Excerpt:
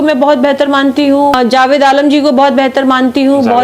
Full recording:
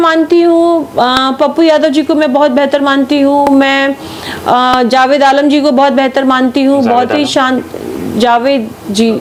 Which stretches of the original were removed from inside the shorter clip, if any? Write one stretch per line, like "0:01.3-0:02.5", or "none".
0:03.5-0:04.7